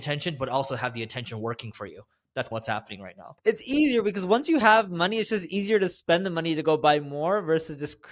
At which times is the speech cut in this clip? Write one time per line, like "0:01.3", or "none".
0:03.4